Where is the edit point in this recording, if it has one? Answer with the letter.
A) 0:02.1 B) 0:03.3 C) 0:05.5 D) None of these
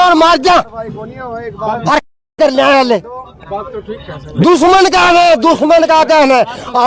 D